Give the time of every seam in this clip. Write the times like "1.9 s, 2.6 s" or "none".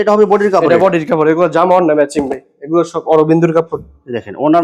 none